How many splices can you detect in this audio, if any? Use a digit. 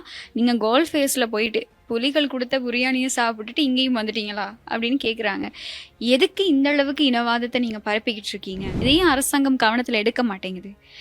1